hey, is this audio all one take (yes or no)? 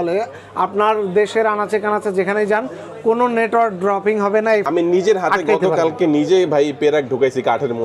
no